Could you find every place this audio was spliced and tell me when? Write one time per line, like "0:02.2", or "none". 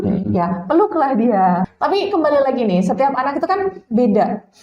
0:01.6